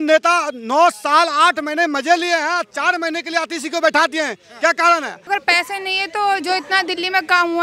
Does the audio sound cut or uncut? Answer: cut